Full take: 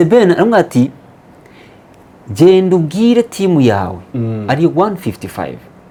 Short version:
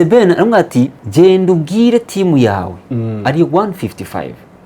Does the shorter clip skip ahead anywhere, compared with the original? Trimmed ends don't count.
yes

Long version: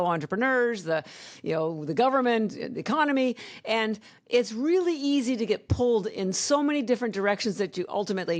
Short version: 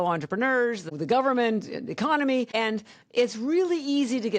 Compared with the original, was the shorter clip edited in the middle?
yes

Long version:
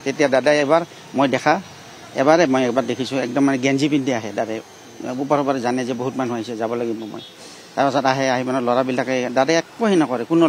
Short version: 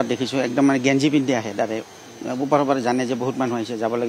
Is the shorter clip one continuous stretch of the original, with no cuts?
yes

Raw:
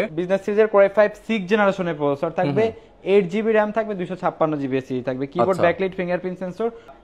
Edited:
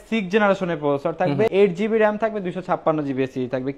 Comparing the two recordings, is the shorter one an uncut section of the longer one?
no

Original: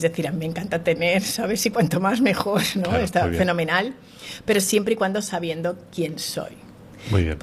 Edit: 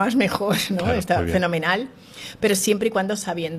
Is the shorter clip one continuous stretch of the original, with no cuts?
yes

